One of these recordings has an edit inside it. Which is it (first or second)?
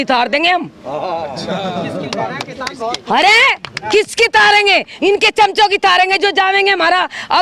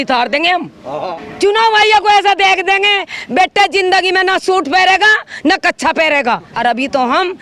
second